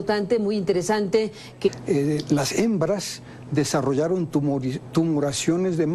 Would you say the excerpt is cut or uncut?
uncut